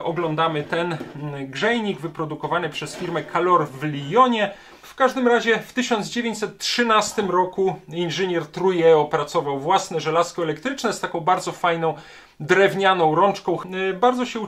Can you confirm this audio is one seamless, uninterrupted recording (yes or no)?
no